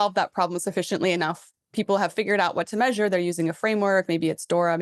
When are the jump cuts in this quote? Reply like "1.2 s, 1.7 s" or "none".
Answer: none